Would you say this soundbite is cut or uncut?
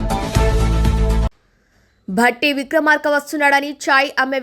cut